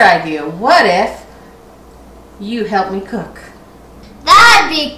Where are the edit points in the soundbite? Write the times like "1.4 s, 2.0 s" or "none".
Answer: 4.0 s

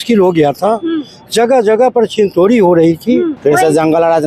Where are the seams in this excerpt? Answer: 3.4 s

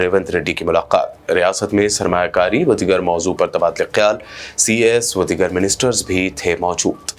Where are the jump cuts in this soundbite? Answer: none

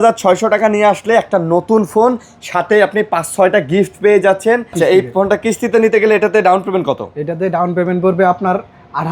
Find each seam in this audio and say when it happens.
4.8 s

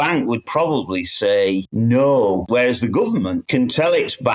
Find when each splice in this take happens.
1.7 s, 2.4 s, 3.4 s

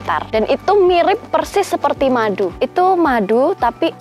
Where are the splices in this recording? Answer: none

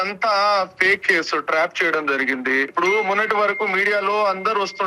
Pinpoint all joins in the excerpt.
2.7 s

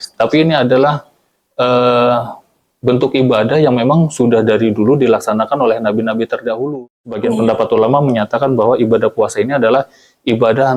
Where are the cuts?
7.2 s

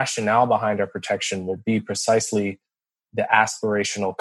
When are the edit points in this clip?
none

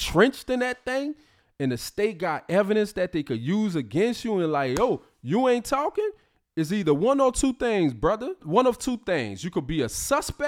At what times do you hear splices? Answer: 8.4 s

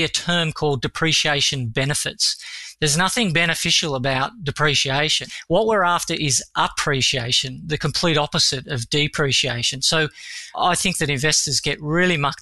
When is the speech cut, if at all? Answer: 5.5 s

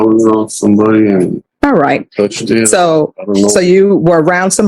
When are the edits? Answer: 1.4 s

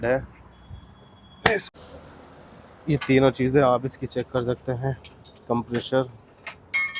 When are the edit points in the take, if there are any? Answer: 1.7 s

